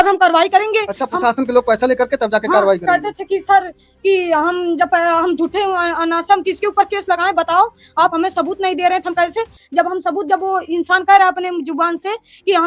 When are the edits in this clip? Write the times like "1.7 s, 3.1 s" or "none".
none